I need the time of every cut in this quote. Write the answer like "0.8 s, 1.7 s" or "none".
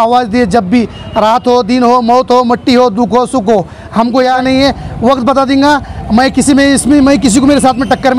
4.4 s